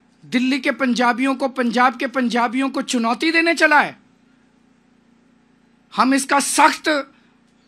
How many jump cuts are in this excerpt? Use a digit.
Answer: 0